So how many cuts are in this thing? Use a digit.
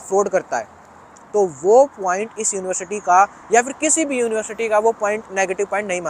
0